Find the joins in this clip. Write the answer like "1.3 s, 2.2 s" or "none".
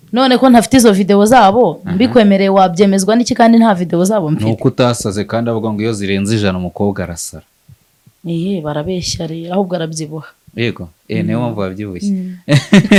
none